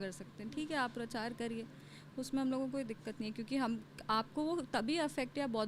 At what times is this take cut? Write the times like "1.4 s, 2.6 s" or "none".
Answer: none